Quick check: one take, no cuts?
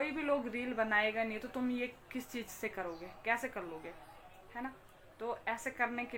yes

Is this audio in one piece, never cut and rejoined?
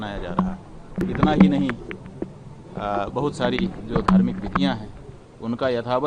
no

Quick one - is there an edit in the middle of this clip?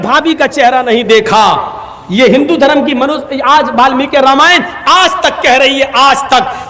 no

